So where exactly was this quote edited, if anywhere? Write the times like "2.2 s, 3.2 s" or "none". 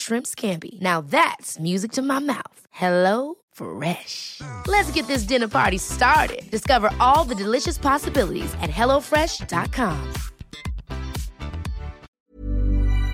12.2 s